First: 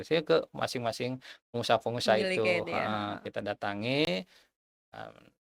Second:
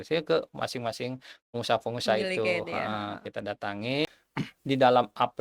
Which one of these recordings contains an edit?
second; 1 cut; at 4.2 s

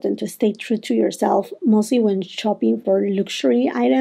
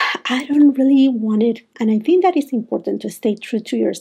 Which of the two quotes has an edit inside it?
second; 1 cut; at 1.7 s

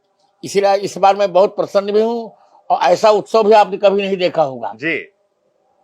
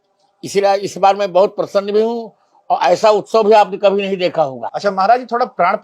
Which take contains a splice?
second; 1 cut; at 4.7 s

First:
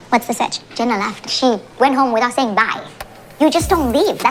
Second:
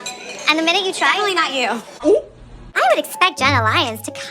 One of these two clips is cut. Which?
second; 1 cut; at 2.4 s

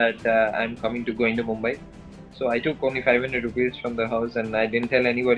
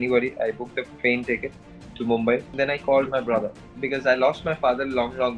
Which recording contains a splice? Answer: second; 1 cut; at 2.5 s

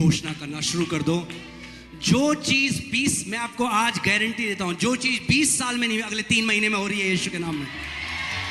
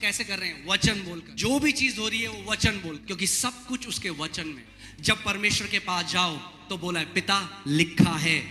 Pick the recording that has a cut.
second; 3 cuts; at 1.3 s, 3.0 s, 4.7 s

